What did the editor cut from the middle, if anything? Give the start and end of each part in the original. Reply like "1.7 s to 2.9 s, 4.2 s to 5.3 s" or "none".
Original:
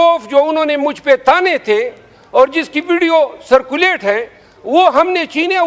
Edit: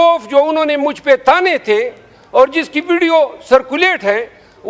none